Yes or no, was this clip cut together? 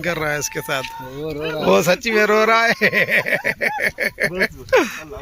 no